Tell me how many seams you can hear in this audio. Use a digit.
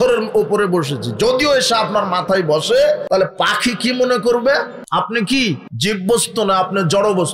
3